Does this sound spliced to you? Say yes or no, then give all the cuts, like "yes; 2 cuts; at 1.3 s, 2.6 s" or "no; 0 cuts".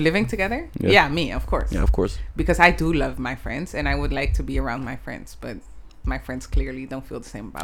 no; 0 cuts